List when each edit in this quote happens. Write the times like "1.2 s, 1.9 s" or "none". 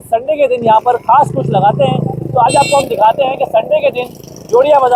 none